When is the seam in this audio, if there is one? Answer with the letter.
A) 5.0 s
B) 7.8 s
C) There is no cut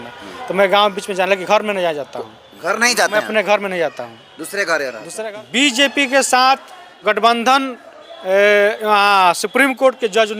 A